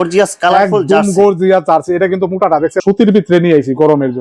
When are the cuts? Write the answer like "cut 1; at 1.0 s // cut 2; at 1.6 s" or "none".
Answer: cut 1; at 2.8 s